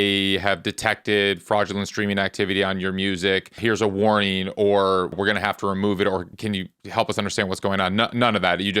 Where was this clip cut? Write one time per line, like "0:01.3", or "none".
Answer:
0:03.6
0:05.1
0:06.3